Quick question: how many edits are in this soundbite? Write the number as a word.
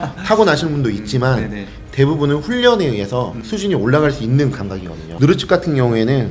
one